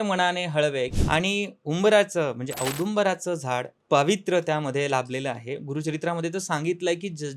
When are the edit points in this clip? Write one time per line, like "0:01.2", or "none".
0:00.9